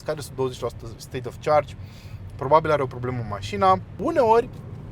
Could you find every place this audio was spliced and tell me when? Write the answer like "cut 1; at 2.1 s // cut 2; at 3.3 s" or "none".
cut 1; at 4.0 s